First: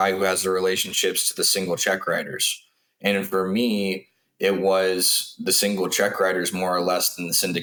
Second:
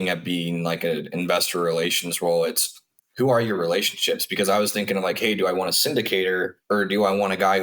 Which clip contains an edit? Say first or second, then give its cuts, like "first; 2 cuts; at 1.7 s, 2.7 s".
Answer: second; 1 cut; at 6.6 s